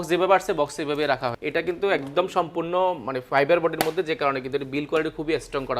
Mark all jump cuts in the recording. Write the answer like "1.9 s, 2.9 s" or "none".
1.4 s